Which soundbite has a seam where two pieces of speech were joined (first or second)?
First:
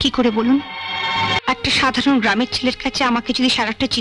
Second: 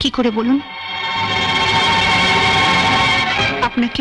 first